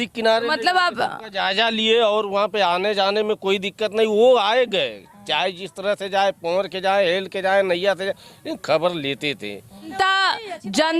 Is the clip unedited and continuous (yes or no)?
no